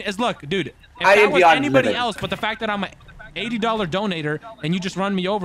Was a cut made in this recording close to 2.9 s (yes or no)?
no